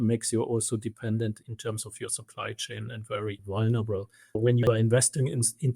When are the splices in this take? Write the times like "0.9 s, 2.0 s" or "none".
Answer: 1.4 s, 3.4 s, 4.4 s